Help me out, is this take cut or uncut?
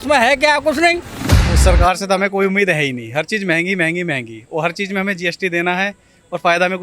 cut